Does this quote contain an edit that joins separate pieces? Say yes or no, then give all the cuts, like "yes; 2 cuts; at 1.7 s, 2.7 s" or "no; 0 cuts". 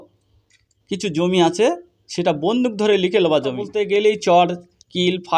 yes; 1 cut; at 3.7 s